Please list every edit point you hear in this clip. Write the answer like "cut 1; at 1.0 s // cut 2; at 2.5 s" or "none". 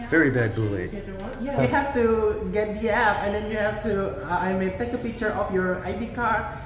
cut 1; at 1.6 s